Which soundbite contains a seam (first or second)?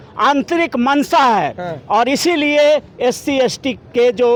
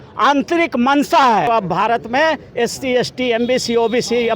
second